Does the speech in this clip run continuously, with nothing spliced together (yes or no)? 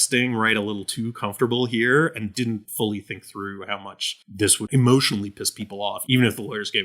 no